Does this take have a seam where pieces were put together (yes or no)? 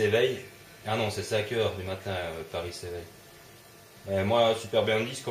no